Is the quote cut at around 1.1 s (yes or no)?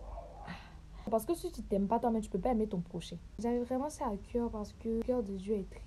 yes